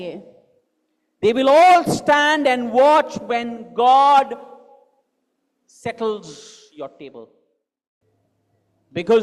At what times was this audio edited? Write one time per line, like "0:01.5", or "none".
0:08.1

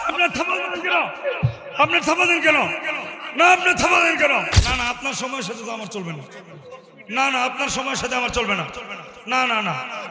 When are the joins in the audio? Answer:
0:04.5

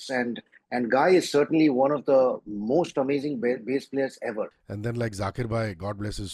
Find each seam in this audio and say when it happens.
0:04.6

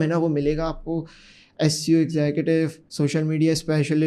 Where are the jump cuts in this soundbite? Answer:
0:02.8

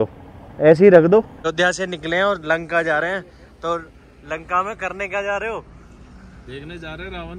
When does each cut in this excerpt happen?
0:01.4

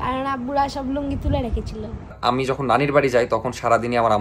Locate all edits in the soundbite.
0:02.2

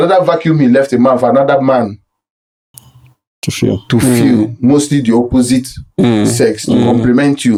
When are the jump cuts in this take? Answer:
none

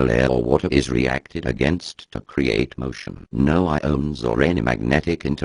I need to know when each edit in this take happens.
none

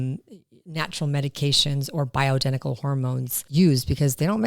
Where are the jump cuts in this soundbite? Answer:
0:03.4

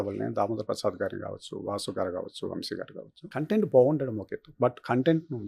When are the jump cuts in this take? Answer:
0:03.2

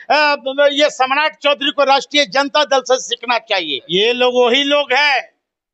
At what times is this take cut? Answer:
0:03.8

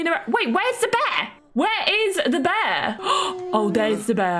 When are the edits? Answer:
0:03.0

